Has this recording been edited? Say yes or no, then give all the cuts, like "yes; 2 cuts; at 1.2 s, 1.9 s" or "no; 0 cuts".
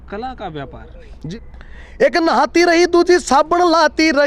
yes; 1 cut; at 1.3 s